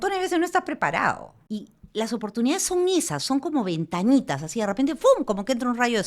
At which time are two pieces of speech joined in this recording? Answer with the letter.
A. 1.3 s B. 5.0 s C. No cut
A